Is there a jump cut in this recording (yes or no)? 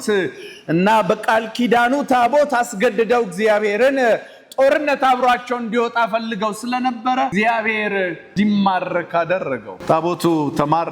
yes